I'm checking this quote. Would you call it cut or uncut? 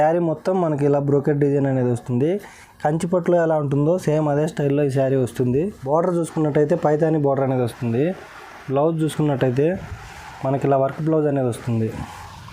cut